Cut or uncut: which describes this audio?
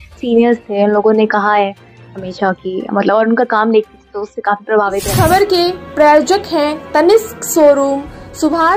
cut